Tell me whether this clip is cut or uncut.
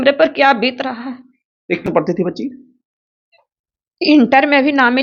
cut